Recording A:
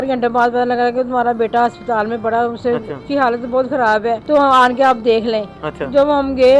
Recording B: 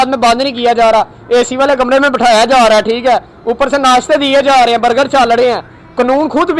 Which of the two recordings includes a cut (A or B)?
A